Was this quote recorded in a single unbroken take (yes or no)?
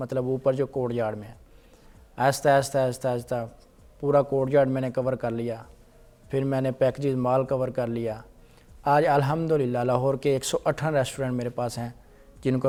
yes